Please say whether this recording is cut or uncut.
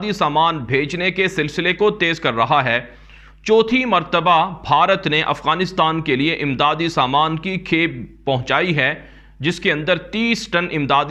uncut